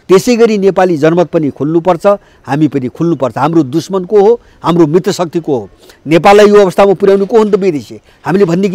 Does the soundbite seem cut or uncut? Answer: uncut